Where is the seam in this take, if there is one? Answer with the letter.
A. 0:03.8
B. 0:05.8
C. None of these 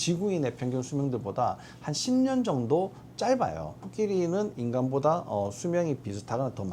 A